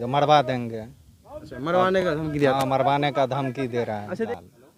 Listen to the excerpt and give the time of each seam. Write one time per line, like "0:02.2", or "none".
none